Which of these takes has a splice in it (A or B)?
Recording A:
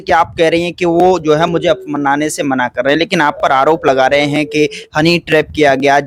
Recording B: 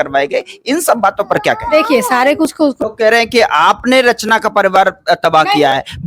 B